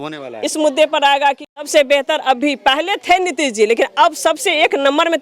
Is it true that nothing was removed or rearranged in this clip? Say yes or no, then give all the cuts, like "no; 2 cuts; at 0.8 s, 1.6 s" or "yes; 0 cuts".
no; 1 cut; at 1.7 s